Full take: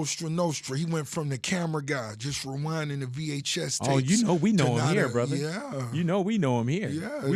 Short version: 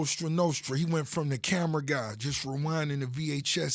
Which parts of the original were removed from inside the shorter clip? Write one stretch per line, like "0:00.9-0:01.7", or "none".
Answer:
none